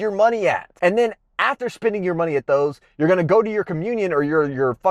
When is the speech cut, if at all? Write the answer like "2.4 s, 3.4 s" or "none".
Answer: none